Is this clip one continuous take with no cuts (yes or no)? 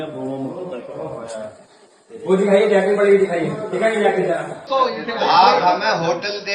no